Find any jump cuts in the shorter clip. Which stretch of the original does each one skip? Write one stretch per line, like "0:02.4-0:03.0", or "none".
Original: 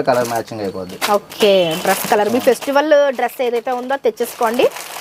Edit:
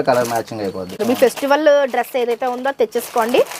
0:01.0-0:02.3